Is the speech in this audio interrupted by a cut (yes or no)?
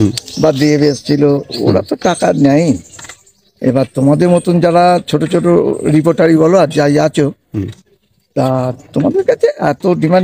no